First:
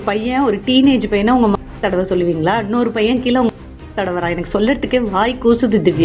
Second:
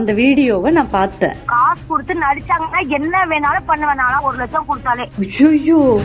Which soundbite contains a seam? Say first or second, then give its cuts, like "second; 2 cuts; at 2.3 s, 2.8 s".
second; 2 cuts; at 1.4 s, 5.1 s